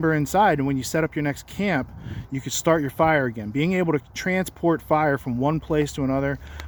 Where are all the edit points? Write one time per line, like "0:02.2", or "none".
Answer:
none